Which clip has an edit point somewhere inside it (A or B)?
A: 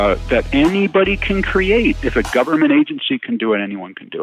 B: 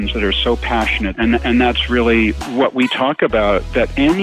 B